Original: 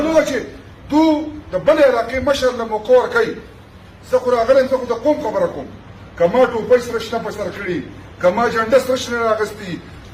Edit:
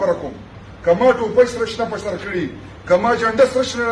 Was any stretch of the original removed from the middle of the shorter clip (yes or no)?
no